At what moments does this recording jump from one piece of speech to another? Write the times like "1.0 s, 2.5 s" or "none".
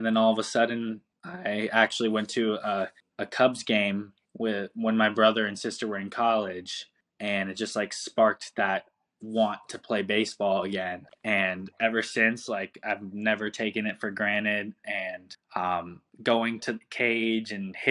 none